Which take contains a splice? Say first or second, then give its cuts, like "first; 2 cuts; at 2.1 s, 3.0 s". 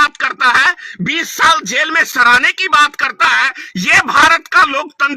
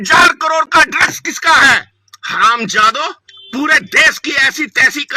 second; 1 cut; at 1.9 s